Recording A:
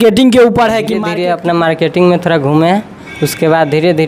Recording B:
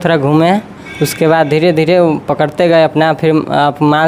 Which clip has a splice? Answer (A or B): A